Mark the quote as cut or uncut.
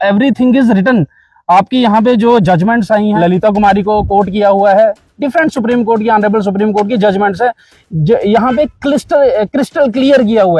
cut